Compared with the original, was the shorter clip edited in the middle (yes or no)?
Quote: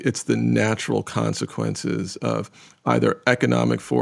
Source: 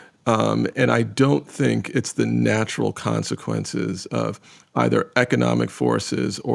no